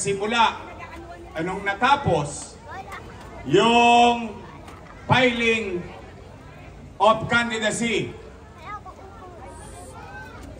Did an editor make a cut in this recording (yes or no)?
no